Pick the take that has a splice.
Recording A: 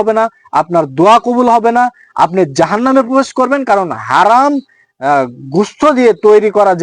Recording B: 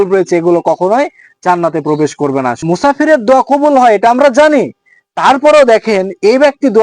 B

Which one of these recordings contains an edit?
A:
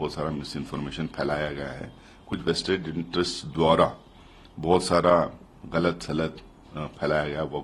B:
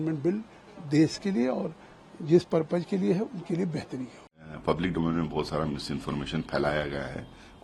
B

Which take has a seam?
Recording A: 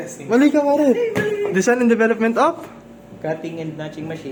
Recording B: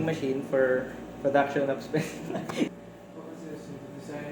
B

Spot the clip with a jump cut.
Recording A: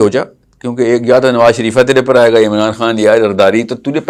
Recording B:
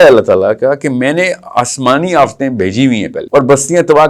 B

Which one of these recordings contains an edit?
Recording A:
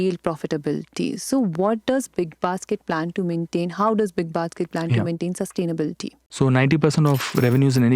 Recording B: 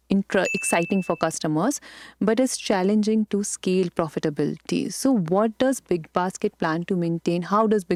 A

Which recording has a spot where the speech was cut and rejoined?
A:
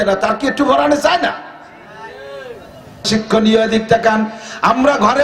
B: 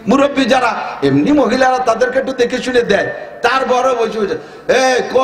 A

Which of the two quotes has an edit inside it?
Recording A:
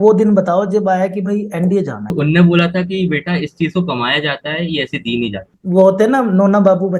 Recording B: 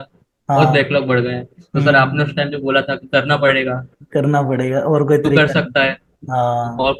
A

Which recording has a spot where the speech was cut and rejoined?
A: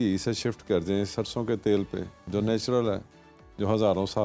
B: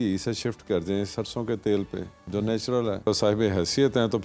B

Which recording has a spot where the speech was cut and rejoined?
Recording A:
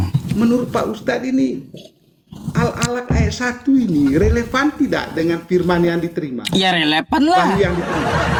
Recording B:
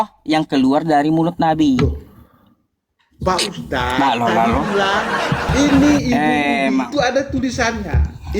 B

